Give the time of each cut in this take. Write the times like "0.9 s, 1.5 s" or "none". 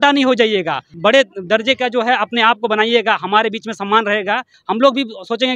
0.9 s, 4.5 s